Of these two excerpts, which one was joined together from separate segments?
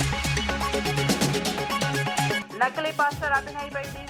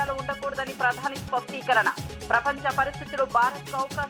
first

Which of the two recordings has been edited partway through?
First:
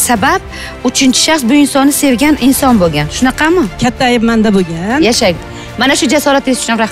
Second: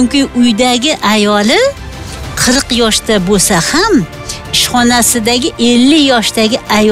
first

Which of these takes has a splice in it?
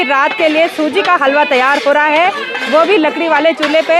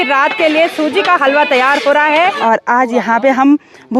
second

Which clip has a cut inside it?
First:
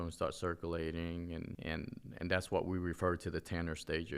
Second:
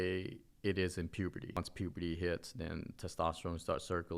second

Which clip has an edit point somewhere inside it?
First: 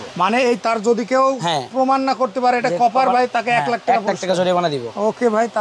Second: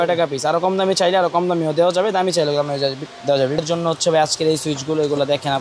second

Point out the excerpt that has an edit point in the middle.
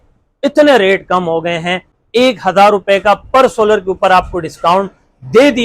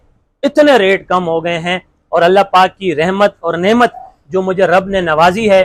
first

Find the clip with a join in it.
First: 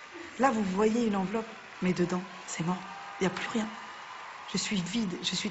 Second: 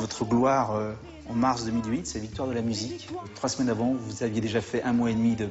second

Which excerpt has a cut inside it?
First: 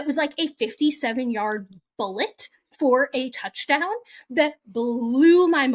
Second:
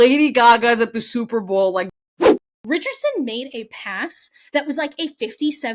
second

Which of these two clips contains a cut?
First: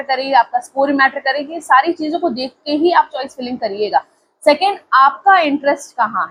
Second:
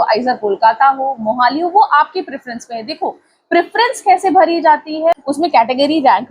second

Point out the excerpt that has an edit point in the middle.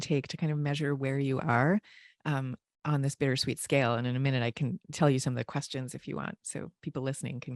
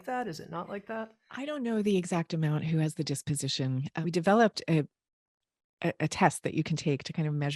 second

